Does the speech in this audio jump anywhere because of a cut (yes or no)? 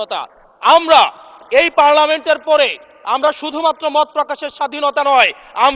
no